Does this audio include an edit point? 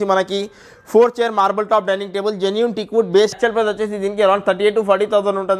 yes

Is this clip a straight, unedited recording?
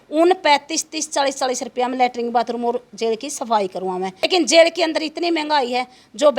no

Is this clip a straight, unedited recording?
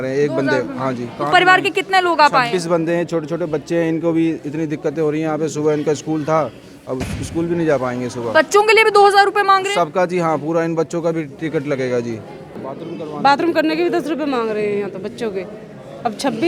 no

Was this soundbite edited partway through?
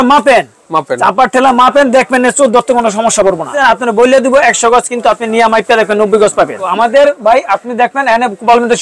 yes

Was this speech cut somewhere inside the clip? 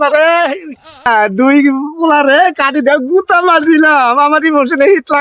yes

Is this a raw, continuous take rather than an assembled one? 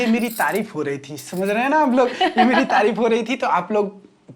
yes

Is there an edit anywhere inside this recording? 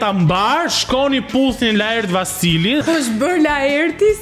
yes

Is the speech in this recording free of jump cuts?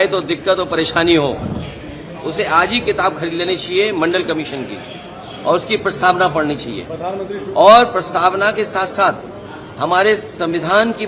yes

